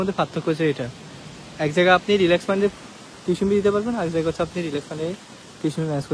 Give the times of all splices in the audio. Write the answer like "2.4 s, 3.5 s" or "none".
none